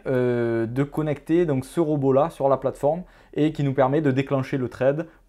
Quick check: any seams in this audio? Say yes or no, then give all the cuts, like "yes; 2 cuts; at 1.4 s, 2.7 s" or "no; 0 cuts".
no; 0 cuts